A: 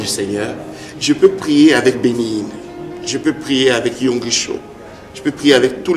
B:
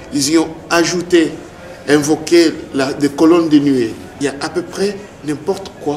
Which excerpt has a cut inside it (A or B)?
B